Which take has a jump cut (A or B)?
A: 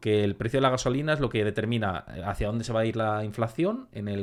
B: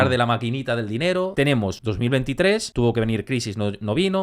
B